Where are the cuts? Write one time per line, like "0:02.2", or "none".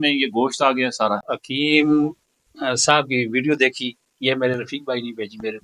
0:01.2